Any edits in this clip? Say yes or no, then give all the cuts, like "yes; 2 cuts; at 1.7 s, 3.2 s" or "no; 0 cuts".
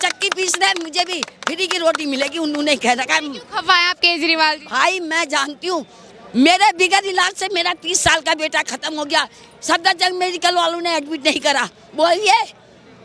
no; 0 cuts